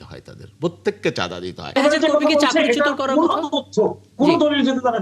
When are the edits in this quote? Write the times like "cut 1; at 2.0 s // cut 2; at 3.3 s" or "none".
cut 1; at 1.8 s